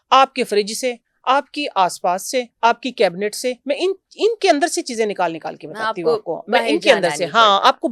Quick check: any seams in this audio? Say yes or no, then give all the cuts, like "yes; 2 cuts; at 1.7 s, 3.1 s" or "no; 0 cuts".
no; 0 cuts